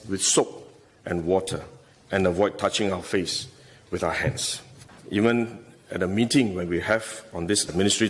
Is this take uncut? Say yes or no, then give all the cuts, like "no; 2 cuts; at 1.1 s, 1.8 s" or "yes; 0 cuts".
no; 1 cut; at 4.9 s